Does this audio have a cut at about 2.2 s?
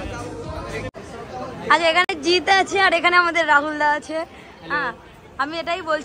no; 1 cut; at 0.9 s

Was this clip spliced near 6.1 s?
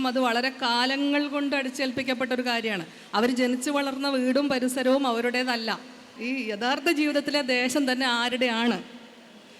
yes; 1 cut; at 6.1 s

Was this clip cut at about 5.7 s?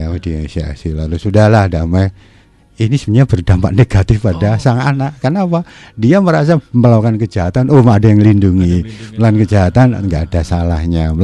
no; 0 cuts

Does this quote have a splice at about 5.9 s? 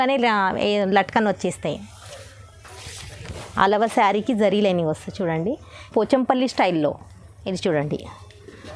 yes; 1 cut; at 5.9 s

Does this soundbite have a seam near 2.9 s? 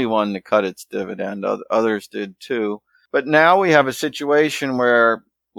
yes; 1 cut; at 2.9 s

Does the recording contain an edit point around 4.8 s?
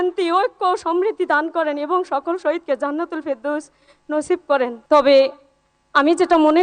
yes; 1 cut; at 4.8 s

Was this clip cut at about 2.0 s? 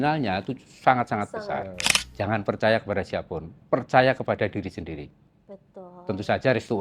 yes; 1 cut; at 2.0 s

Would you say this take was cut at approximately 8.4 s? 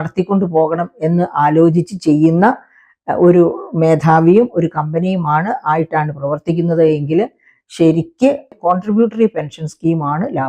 no; 0 cuts

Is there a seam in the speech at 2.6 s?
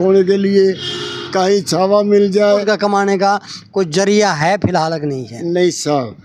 yes; 1 cut; at 2.6 s

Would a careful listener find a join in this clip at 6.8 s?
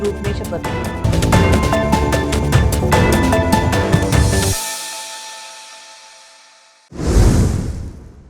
yes; 1 cut; at 6.8 s

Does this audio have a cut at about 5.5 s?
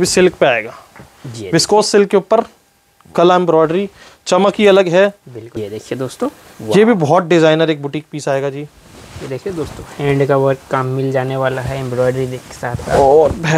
yes; 1 cut; at 5.5 s

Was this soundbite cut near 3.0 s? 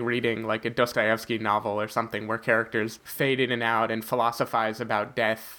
yes; 1 cut; at 3.0 s

